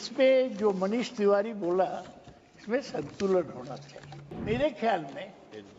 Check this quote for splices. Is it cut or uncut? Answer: cut